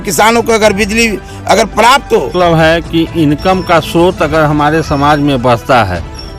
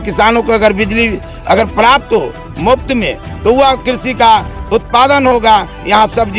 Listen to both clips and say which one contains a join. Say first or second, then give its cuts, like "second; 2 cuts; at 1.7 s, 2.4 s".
first; 1 cut; at 2.3 s